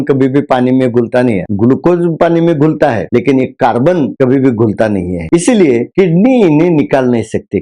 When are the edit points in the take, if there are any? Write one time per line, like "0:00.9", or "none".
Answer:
0:01.4